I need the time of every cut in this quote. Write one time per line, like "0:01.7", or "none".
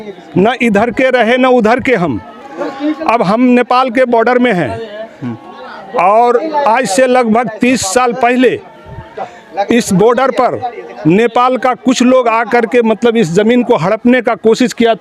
none